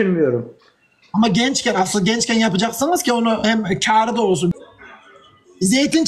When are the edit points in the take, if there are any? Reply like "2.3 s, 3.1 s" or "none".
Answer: 4.5 s